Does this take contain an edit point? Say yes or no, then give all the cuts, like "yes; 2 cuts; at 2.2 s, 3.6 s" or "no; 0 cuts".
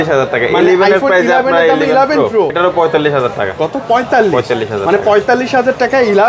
yes; 1 cut; at 2.5 s